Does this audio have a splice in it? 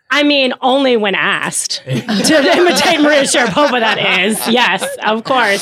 no; 0 cuts

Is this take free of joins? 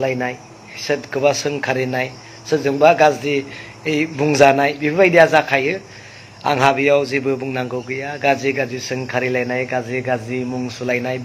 yes; 0 cuts

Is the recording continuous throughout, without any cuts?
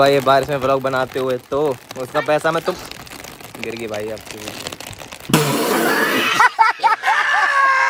yes; 0 cuts

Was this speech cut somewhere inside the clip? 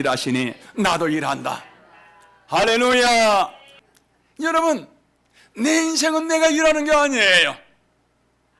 yes; 1 cut; at 3.7 s

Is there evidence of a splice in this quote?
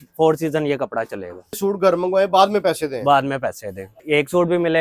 yes; 2 cuts; at 1.6 s, 4.0 s

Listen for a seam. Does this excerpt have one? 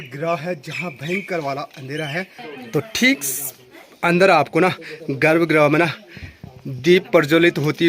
yes; 1 cut; at 2.4 s

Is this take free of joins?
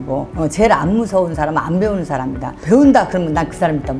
yes; 0 cuts

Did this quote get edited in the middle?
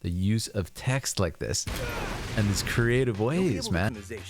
no; 0 cuts

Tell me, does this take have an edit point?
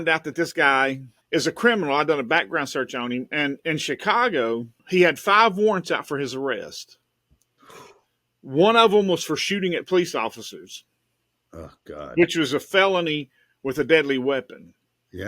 yes; 2 cuts; at 1.1 s, 4.7 s

